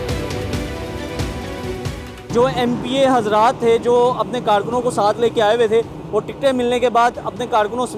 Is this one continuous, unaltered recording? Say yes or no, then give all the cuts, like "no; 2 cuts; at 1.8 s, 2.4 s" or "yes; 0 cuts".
no; 1 cut; at 2.1 s